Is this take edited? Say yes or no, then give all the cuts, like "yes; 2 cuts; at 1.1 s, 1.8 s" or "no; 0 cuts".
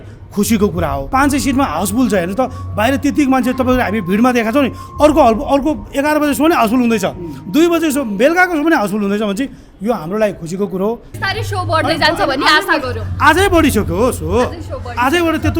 yes; 2 cuts; at 1.0 s, 11.1 s